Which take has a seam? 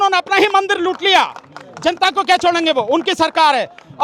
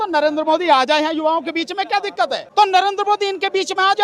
second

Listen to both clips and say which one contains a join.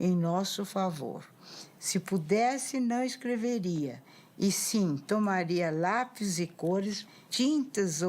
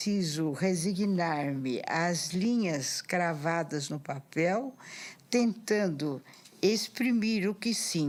first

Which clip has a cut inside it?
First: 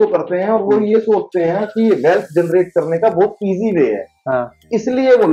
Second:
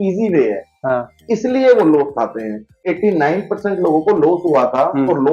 second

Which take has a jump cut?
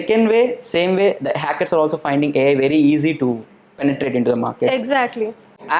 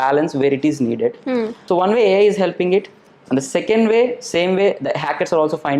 second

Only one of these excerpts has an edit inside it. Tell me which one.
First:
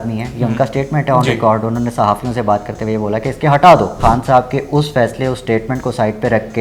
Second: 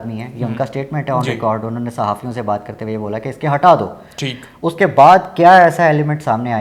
first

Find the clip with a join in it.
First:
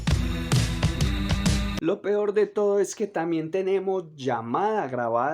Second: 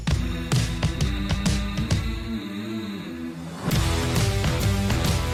first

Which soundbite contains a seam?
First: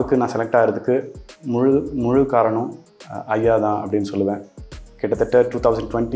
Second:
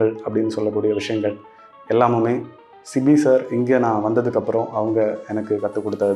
first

